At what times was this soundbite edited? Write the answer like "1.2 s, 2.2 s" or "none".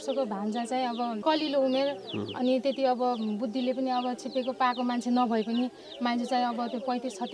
1.2 s